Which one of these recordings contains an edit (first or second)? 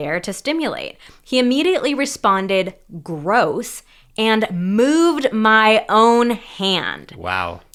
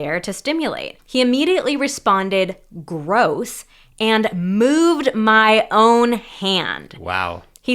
second